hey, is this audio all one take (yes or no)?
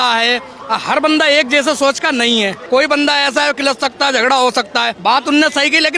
no